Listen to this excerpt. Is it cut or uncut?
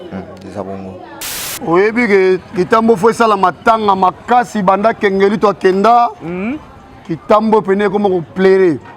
cut